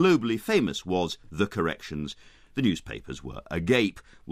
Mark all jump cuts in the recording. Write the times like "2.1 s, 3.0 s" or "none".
none